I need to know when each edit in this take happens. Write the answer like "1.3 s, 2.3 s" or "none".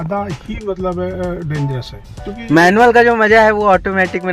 2.3 s

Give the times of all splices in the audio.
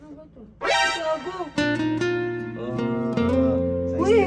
none

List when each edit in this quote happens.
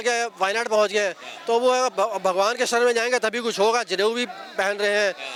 none

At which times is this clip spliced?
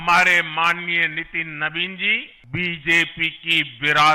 2.4 s

